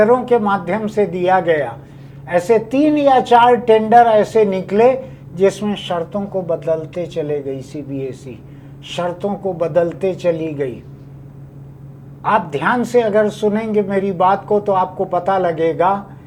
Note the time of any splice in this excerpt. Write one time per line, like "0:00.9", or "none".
none